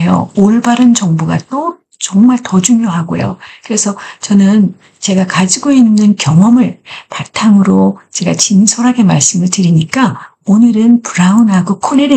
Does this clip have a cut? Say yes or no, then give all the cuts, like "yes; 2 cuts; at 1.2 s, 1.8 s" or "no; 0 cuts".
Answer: no; 0 cuts